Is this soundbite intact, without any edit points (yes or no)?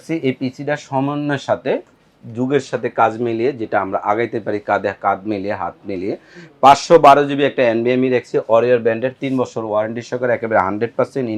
yes